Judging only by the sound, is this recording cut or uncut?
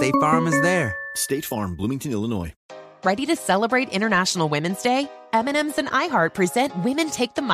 cut